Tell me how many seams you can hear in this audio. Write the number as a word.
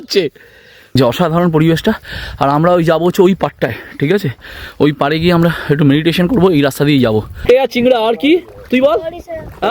two